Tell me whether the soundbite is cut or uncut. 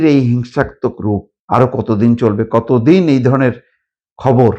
cut